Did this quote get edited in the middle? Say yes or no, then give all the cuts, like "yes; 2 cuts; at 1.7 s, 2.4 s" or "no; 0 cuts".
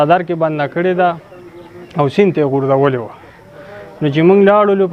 no; 0 cuts